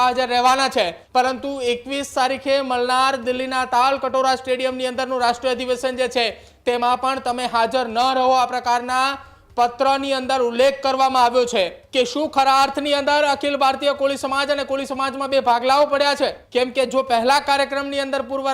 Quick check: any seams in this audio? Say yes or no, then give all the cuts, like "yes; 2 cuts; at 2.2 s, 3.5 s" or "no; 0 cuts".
yes; 3 cuts; at 1.0 s, 11.8 s, 16.4 s